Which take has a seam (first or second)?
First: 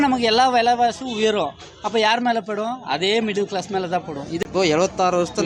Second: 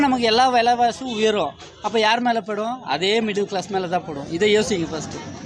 first